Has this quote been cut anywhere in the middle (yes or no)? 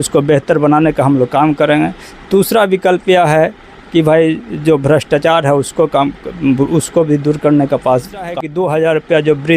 yes